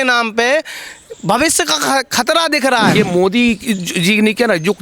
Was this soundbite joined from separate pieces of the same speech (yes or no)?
yes